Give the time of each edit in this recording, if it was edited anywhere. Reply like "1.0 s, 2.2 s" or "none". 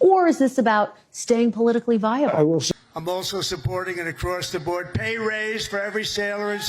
2.7 s